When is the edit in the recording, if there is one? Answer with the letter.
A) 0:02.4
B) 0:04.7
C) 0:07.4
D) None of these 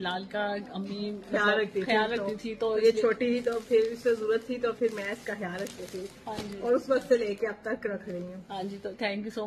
D